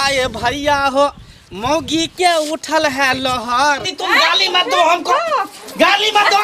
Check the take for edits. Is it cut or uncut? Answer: cut